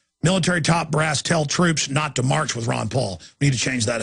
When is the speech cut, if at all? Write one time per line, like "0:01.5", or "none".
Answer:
none